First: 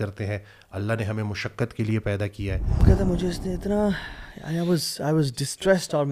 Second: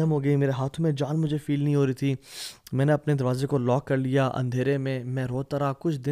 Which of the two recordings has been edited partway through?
first; 1 cut; at 2.8 s

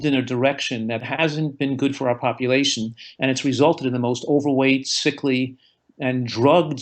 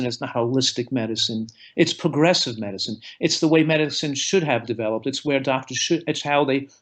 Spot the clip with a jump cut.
first; 1 cut; at 1.1 s

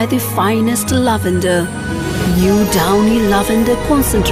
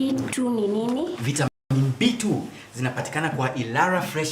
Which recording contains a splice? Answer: second; 1 cut; at 1.7 s

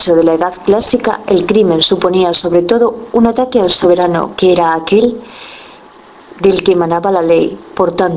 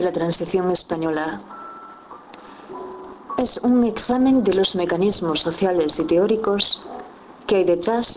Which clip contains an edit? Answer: second; 1 cut; at 4.3 s

